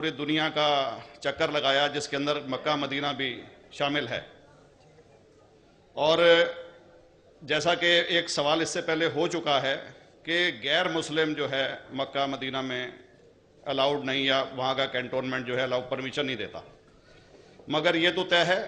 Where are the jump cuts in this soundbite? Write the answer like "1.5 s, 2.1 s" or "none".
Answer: 11.7 s

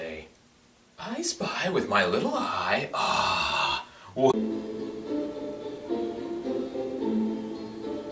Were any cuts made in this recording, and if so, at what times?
none

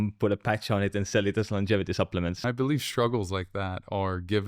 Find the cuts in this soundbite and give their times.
2.4 s

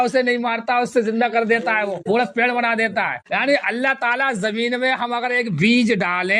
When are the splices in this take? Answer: 3.3 s

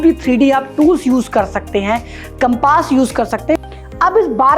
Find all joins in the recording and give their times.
3.5 s

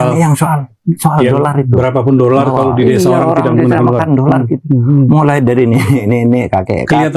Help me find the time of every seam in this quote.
none

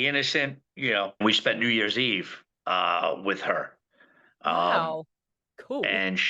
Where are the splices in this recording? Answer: 1.2 s

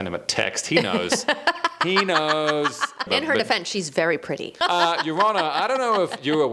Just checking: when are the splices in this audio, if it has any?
3.1 s, 4.6 s

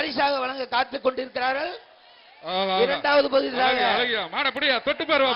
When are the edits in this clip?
none

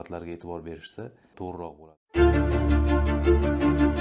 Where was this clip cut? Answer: 1.7 s

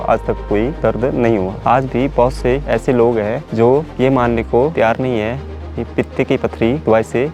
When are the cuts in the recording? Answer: none

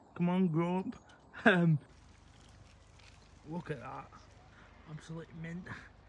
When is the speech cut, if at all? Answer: 2.1 s

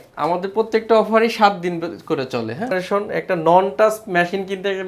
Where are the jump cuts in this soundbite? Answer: 2.8 s

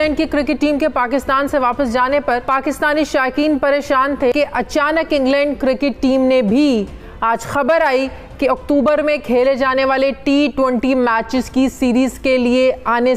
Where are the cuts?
2.4 s, 4.3 s

